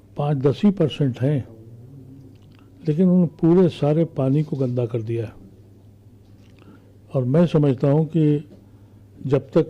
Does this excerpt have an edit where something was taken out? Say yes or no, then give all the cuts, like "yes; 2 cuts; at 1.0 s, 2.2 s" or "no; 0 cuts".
no; 0 cuts